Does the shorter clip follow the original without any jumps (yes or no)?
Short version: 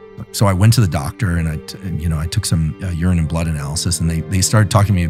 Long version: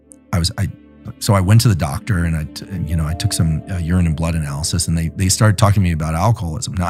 yes